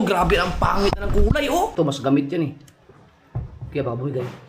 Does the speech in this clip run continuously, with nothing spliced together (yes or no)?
no